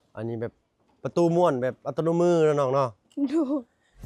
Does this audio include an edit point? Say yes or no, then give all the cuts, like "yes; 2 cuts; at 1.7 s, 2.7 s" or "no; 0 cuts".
no; 0 cuts